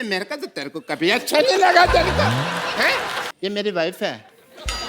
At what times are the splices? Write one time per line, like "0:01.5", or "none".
0:03.3